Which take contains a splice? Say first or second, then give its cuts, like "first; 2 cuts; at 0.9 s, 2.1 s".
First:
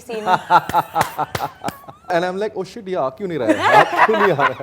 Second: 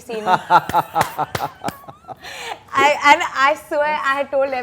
first; 1 cut; at 2.1 s